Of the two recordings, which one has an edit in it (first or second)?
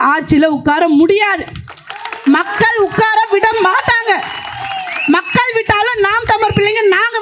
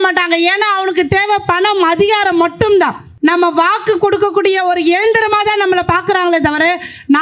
second